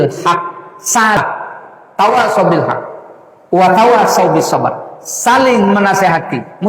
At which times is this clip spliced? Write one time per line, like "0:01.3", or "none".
0:01.2